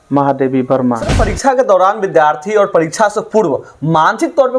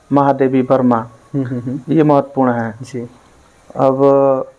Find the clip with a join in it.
first; 1 cut; at 1.2 s

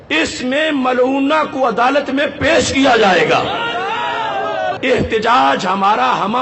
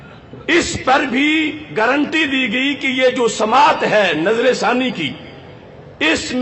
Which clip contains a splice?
first; 1 cut; at 4.8 s

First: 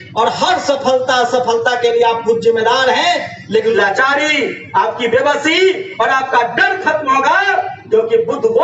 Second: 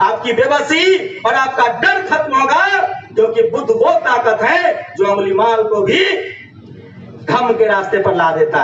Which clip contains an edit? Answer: first; 1 cut; at 3.7 s

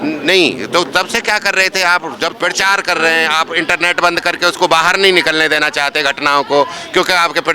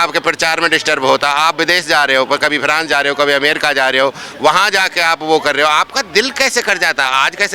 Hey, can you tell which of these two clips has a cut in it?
first; 1 cut; at 2.3 s

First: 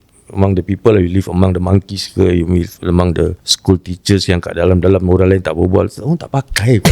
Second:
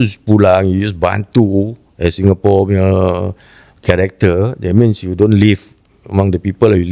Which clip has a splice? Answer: first; 1 cut; at 3.5 s

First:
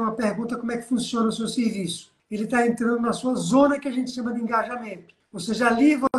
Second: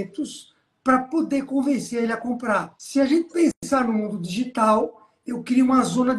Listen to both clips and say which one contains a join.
first; 1 cut; at 2.3 s

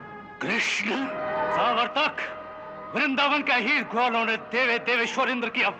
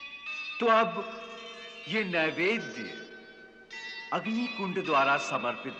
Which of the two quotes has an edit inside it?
first; 1 cut; at 1.2 s

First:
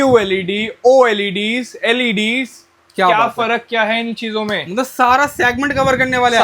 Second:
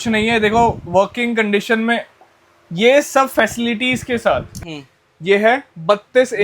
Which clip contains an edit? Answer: second; 1 cut; at 4.5 s

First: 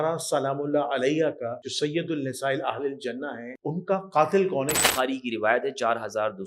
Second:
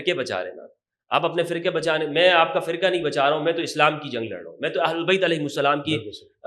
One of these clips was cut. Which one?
first; 3 cuts; at 1.6 s, 3.5 s, 4.8 s

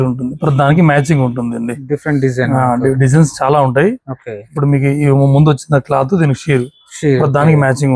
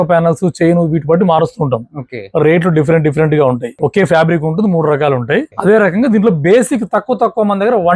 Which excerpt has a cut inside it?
second; 2 cuts; at 3.7 s, 5.5 s

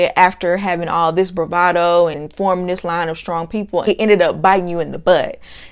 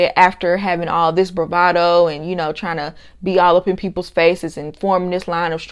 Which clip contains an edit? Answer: first; 2 cuts; at 2.2 s, 3.9 s

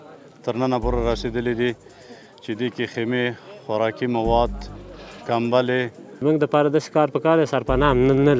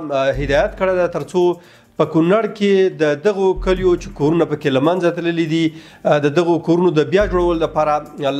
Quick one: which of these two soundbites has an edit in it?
first; 1 cut; at 6.2 s

